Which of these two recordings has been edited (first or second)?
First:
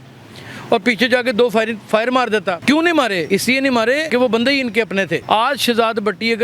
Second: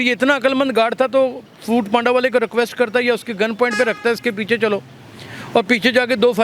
first